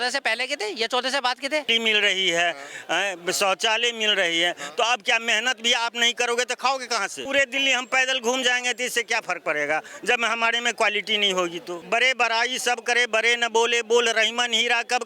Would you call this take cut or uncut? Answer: cut